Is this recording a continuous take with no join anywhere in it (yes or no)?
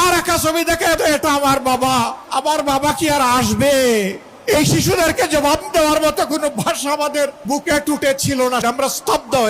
no